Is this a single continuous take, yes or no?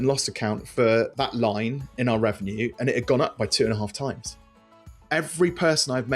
no